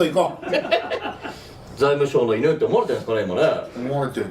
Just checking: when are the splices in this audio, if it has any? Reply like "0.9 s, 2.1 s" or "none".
1.6 s